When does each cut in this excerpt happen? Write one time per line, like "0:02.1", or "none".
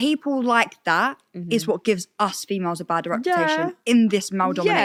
none